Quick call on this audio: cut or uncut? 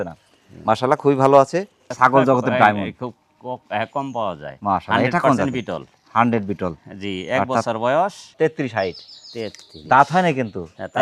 cut